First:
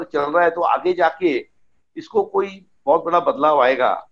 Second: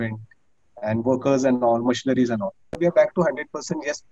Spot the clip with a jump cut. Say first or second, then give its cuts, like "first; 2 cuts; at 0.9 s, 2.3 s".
second; 1 cut; at 2.7 s